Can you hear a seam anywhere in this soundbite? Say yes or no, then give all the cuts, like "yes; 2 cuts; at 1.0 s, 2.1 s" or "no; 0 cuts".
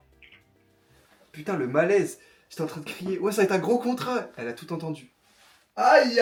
no; 0 cuts